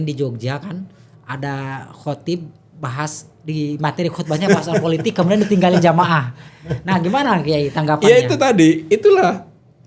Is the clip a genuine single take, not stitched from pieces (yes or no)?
yes